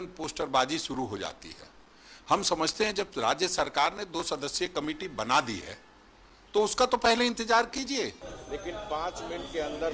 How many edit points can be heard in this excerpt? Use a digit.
1